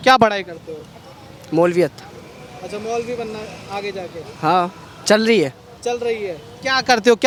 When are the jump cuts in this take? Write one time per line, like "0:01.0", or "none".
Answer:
none